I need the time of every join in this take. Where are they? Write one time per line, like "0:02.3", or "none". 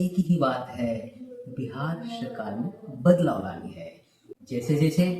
0:04.2